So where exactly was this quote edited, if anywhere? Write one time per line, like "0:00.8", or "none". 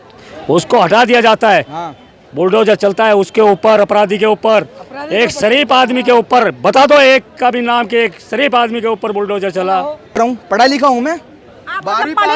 0:10.2